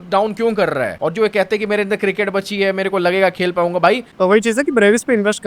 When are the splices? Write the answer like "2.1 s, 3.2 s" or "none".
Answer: 0.9 s, 4.1 s